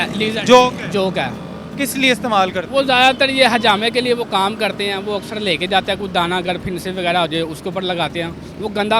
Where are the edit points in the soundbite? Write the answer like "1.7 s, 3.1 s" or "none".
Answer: none